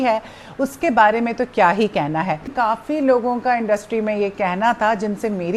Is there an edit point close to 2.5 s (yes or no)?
yes